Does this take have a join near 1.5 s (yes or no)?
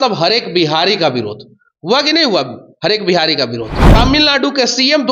no